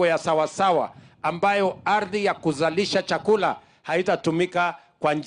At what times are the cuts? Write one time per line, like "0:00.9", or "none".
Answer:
none